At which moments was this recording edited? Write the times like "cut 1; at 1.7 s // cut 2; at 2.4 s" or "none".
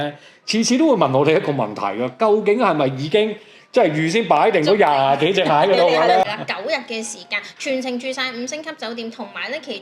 cut 1; at 6.2 s